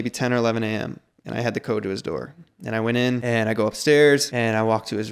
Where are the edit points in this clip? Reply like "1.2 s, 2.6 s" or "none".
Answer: 3.2 s, 4.3 s

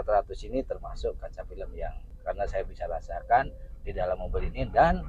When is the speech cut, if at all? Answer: 2.1 s

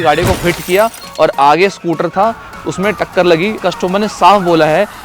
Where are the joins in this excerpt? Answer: 3.6 s

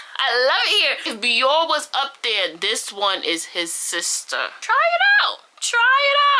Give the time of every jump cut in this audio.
1.1 s, 4.6 s

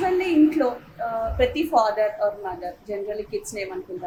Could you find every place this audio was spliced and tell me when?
none

